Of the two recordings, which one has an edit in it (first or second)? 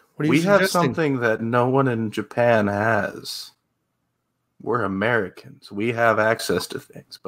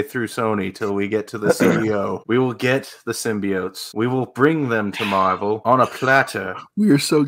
second